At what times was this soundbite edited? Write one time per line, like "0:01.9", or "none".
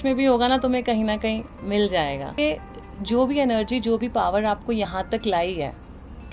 0:02.3

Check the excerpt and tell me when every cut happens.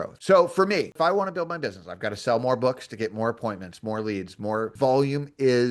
0:00.9

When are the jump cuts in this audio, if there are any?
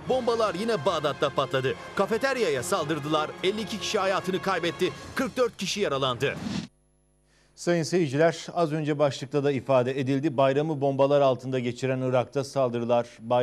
none

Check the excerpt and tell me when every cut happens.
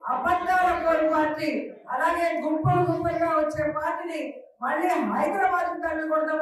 none

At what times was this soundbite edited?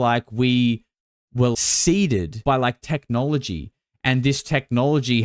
0:01.5
0:02.3

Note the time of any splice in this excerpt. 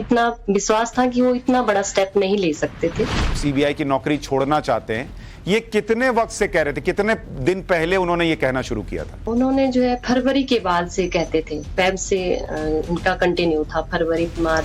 0:03.3
0:09.1

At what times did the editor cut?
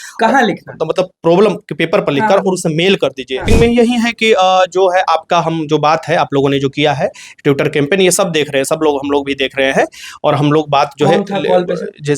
0:03.5

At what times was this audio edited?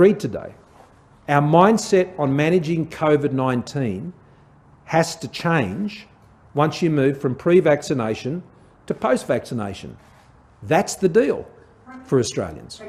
none

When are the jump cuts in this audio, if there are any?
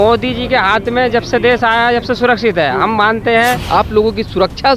0:03.7

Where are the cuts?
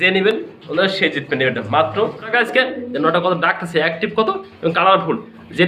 0:02.3

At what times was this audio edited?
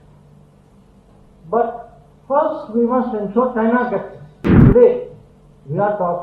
0:04.6

